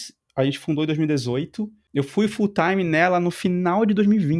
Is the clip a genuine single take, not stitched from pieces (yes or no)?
no